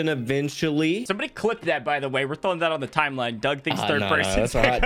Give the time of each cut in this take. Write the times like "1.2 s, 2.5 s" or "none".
1.1 s